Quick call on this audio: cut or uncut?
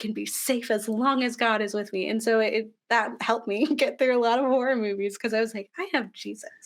cut